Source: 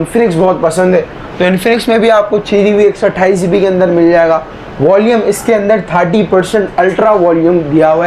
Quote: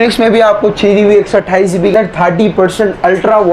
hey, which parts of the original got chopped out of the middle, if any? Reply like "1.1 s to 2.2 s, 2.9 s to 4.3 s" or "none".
3.6 s to 5.7 s